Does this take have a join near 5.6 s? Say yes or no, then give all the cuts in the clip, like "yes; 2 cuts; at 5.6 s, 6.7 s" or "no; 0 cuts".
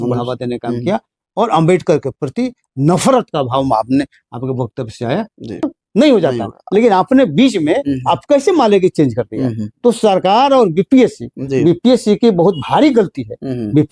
yes; 1 cut; at 5.6 s